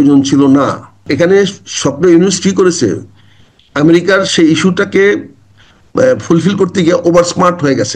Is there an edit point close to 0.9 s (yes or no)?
yes